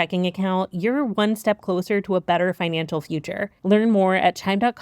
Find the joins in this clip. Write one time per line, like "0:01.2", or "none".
0:03.5